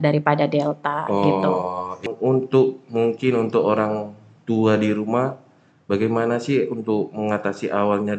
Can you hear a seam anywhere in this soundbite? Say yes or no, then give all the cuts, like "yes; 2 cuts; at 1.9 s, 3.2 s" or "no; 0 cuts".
yes; 1 cut; at 2.1 s